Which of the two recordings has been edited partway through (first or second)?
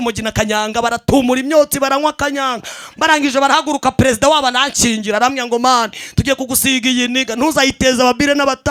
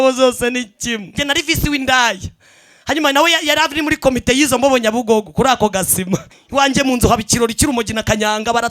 second